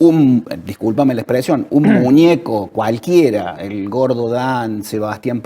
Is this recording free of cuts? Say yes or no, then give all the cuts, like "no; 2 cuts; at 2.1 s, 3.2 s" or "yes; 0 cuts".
yes; 0 cuts